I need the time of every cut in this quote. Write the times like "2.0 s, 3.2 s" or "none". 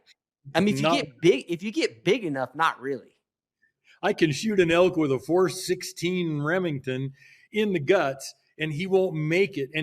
none